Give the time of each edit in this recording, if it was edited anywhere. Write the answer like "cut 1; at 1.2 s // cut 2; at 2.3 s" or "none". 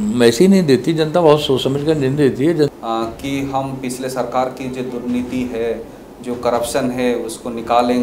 cut 1; at 2.7 s